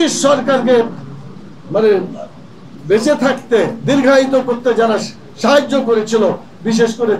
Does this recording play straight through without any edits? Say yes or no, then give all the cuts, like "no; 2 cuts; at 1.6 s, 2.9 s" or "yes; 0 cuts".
yes; 0 cuts